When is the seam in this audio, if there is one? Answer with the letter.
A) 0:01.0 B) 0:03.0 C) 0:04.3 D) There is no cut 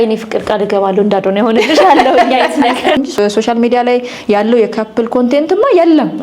B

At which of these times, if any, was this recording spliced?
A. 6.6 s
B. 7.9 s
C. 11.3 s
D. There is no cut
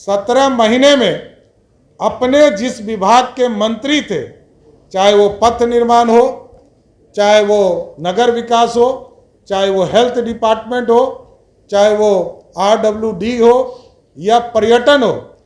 D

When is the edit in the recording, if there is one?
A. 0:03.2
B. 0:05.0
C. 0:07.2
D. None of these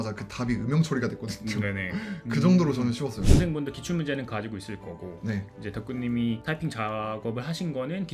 A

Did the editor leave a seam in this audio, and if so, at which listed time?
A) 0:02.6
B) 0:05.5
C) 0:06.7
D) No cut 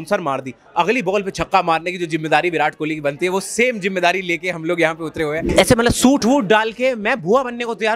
B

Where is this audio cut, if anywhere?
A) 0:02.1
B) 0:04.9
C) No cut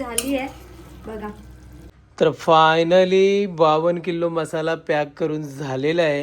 A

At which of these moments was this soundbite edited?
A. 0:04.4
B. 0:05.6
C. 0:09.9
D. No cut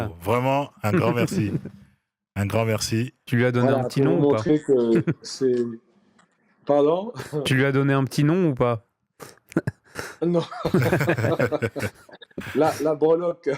D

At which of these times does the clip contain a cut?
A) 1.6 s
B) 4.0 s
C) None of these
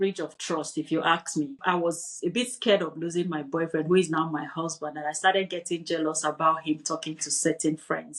A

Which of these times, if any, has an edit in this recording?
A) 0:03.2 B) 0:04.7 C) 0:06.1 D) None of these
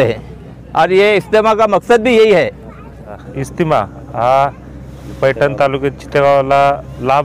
A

